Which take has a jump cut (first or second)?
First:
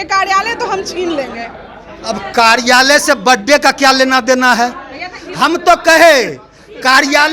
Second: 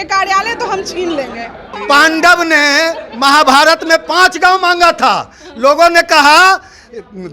second